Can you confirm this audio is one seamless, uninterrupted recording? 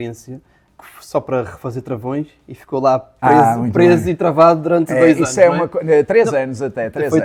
yes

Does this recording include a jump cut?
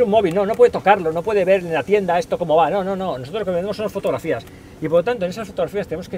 no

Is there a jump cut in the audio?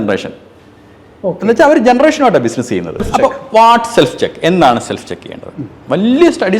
yes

